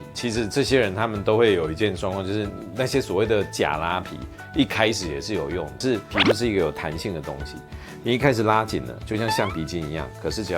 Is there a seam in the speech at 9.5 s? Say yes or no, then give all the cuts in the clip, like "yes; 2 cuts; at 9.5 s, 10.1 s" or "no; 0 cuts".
no; 1 cut; at 5.7 s